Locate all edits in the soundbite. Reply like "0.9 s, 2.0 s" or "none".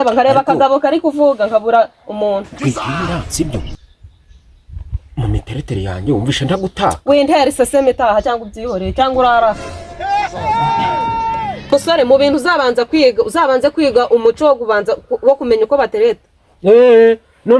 none